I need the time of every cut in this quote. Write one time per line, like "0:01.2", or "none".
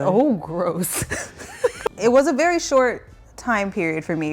0:01.8